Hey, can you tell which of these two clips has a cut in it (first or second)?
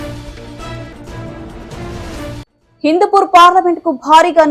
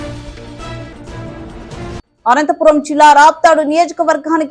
second